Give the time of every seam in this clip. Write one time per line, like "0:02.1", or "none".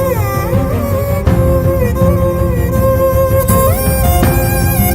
none